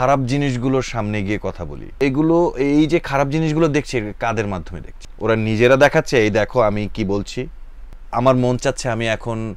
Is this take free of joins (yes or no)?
yes